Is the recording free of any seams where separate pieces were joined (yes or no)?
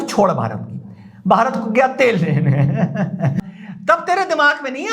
no